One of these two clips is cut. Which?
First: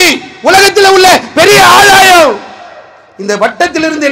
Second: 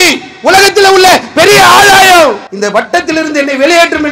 second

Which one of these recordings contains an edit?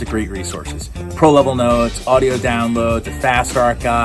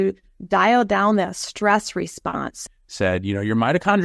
second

